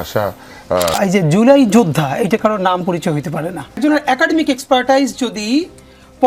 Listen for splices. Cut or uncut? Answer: cut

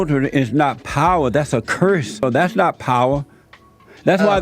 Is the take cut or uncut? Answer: cut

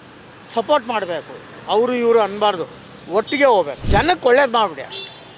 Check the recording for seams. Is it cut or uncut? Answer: cut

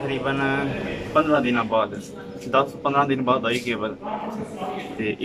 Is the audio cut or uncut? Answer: uncut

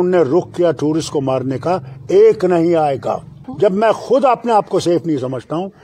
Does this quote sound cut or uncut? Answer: cut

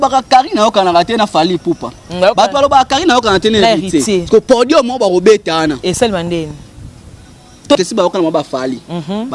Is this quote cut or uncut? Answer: cut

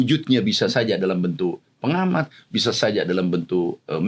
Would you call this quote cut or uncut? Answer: uncut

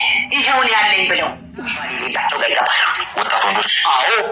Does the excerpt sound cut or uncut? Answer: cut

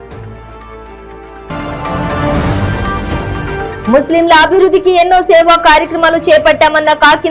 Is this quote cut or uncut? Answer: cut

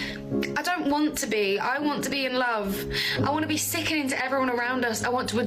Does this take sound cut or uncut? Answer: uncut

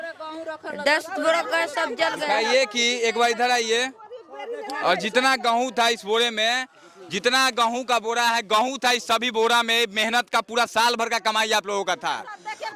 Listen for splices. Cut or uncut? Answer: uncut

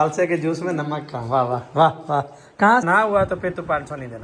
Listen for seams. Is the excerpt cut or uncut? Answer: cut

